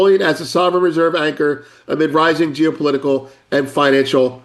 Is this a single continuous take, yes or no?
yes